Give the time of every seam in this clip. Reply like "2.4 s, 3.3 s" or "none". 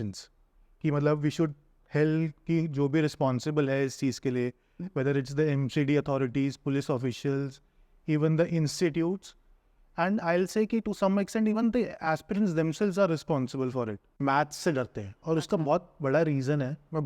14.2 s